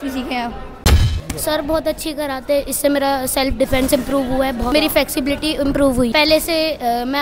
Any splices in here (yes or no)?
yes